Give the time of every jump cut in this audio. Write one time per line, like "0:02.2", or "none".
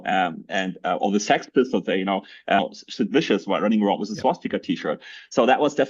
0:02.6